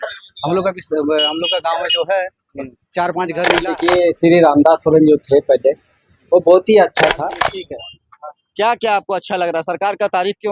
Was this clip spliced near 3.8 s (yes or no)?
yes